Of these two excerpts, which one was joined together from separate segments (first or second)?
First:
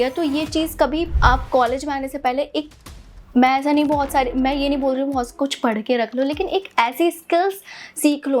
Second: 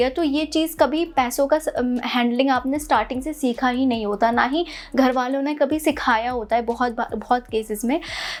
first